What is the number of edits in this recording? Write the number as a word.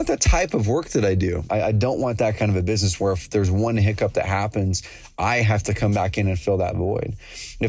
one